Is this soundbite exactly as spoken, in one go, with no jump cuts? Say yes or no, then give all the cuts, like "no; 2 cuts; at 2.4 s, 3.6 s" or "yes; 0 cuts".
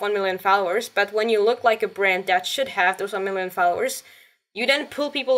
yes; 0 cuts